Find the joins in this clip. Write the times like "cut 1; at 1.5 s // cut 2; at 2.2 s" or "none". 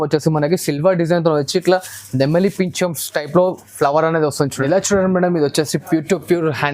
cut 1; at 4.6 s